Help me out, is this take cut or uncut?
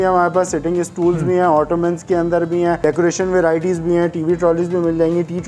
cut